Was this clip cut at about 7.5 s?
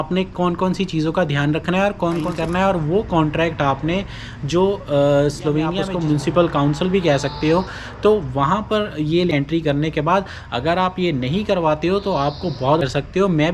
no; 4 cuts; at 2.3 s, 5.9 s, 9.3 s, 12.8 s

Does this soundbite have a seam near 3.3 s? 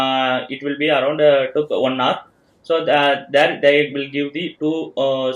no; 0 cuts

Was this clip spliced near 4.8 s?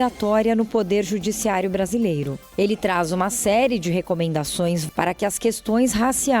yes; 1 cut; at 4.8 s

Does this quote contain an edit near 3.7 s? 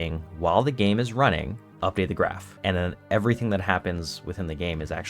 no; 2 cuts; at 1.6 s, 2.5 s

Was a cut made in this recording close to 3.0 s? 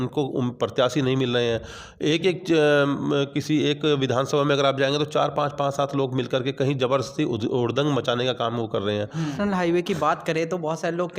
no; 1 cut; at 9.3 s

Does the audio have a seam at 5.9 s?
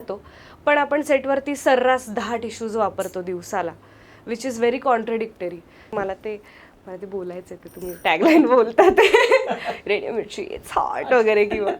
yes; 1 cut; at 5.9 s

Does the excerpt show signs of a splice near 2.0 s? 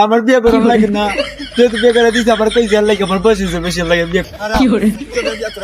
no; 1 cut; at 4.2 s

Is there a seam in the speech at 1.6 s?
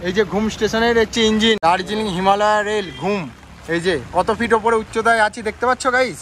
yes; 1 cut; at 1.6 s

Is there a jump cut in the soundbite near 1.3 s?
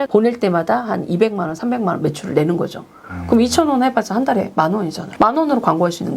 no; 1 cut; at 5.0 s

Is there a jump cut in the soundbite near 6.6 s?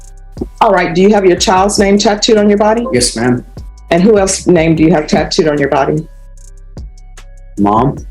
no; 1 cut; at 3.5 s

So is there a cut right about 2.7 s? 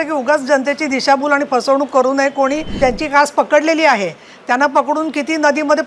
yes; 1 cut; at 2.7 s

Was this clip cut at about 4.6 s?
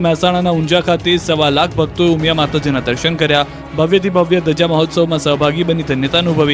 no; 1 cut; at 2.6 s

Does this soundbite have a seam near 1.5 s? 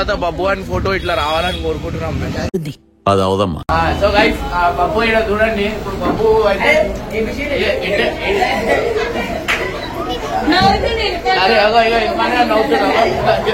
no; 1 cut; at 3.6 s

